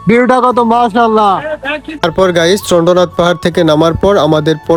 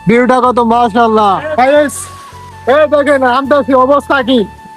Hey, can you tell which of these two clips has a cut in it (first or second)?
second